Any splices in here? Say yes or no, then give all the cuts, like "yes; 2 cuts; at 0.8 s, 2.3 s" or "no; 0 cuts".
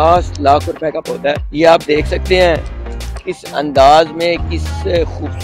yes; 1 cut; at 1.5 s